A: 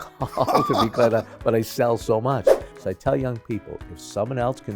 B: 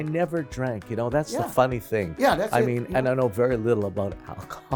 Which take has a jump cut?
A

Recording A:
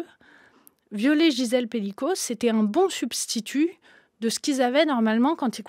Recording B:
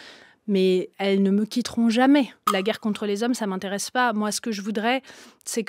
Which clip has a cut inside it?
B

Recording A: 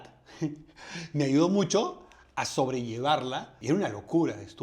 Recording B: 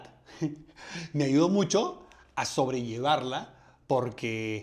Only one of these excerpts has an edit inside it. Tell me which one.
A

